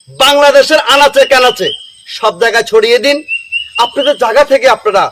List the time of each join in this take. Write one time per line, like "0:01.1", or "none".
none